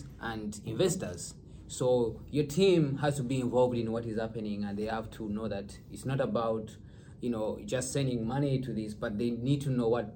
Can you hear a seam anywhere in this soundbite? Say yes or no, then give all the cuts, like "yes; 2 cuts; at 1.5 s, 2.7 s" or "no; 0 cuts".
no; 0 cuts